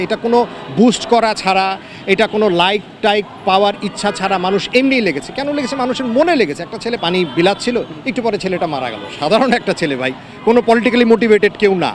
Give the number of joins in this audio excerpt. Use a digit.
1